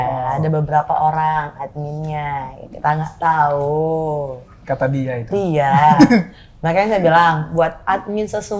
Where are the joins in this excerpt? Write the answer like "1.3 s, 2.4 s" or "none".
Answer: none